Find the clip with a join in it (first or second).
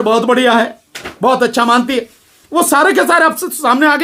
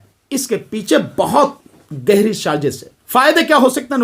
second